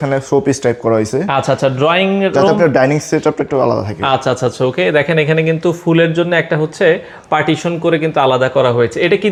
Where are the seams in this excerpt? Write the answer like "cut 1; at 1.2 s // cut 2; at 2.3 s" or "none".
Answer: none